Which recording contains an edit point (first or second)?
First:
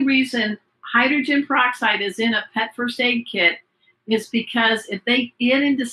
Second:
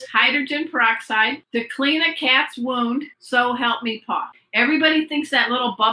second